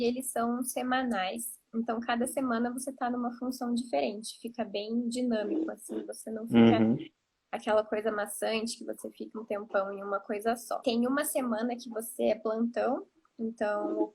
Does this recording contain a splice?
yes; 2 cuts; at 9.2 s, 10.8 s

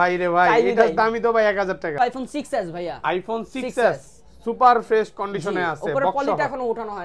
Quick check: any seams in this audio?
yes; 1 cut; at 2.0 s

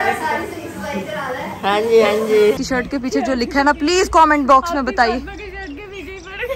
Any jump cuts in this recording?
yes; 1 cut; at 2.6 s

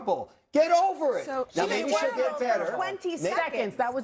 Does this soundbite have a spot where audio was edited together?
no; 0 cuts

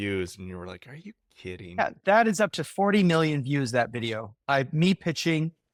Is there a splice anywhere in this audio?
no; 0 cuts

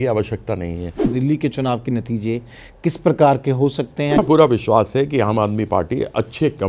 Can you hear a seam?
yes; 2 cuts; at 1.1 s, 4.1 s

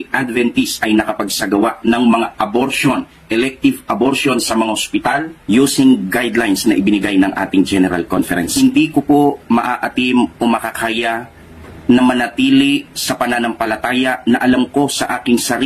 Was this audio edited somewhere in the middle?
yes; 3 cuts; at 3.2 s, 8.5 s, 12.6 s

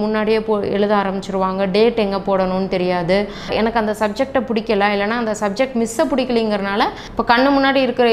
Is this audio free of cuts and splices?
no; 2 cuts; at 3.5 s, 7.0 s

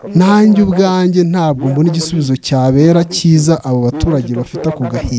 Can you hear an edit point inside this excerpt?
no; 0 cuts

